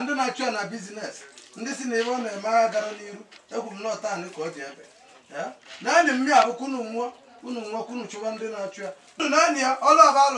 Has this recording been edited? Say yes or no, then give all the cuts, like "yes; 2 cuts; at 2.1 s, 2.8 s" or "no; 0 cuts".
yes; 1 cut; at 9.2 s